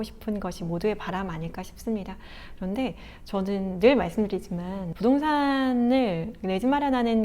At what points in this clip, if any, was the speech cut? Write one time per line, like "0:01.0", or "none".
0:04.8